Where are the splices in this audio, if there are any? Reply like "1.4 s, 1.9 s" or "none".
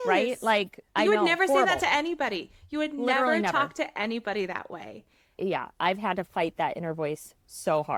none